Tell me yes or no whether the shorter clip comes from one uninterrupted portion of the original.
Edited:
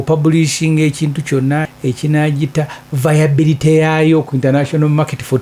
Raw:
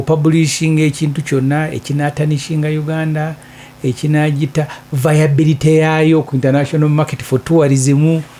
no